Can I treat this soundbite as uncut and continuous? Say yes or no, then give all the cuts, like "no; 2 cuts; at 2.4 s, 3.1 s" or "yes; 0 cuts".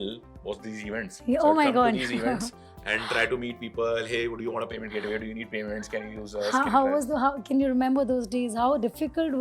yes; 0 cuts